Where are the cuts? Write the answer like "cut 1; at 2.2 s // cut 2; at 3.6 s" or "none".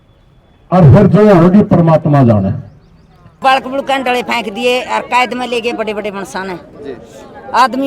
cut 1; at 3.2 s